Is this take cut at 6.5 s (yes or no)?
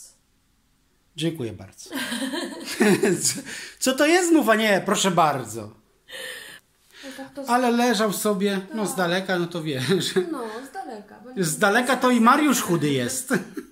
yes